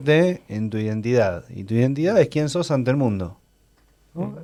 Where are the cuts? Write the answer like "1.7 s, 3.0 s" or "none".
none